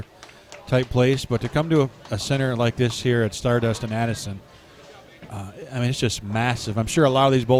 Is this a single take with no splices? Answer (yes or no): yes